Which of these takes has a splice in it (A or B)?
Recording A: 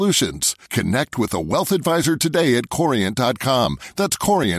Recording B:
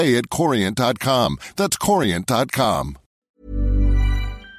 B